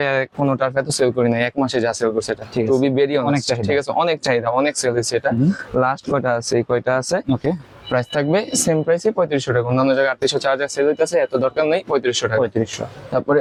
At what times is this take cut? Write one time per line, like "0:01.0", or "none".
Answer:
none